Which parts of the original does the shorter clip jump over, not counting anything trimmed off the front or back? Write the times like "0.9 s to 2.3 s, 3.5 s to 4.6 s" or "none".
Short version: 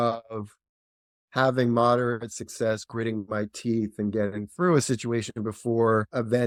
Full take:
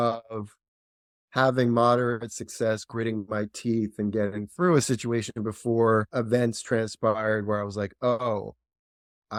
none